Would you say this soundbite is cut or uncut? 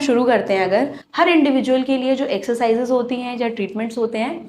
cut